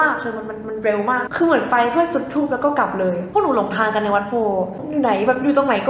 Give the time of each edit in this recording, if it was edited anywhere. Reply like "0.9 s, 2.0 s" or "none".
1.3 s, 3.3 s, 4.8 s

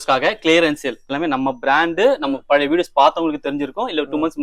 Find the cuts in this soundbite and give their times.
1.2 s

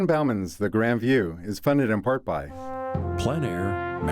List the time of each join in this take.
2.5 s

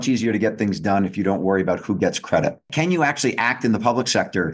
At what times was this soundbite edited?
2.7 s

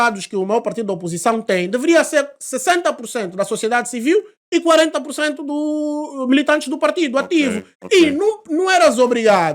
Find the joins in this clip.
none

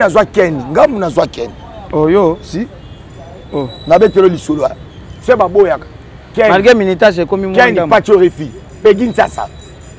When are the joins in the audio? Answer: none

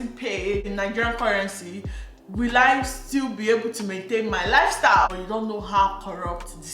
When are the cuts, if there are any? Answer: 5.1 s

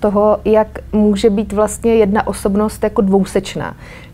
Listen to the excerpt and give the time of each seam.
none

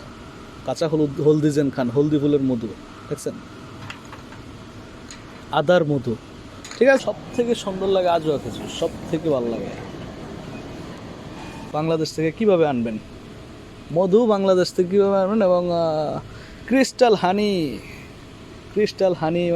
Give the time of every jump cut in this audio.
7.0 s, 11.6 s

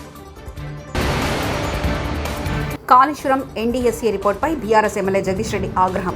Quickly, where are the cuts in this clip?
0.9 s, 2.6 s

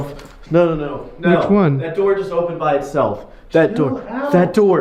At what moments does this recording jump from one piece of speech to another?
none

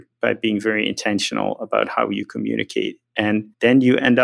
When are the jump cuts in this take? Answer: 3.3 s

